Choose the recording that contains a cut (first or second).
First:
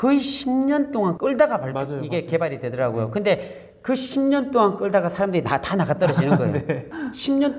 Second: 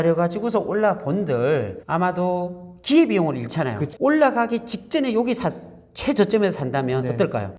second